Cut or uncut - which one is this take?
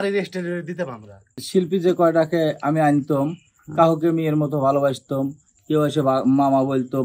cut